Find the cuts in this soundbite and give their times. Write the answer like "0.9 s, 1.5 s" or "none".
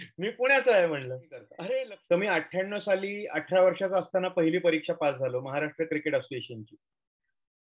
1.9 s